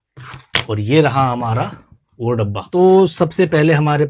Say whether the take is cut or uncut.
cut